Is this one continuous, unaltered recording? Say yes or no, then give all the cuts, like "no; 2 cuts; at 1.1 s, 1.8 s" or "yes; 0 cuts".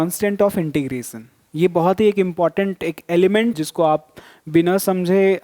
no; 1 cut; at 3.5 s